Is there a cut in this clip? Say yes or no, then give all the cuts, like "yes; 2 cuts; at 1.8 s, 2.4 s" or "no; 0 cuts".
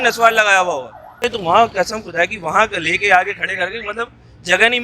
yes; 1 cut; at 1.2 s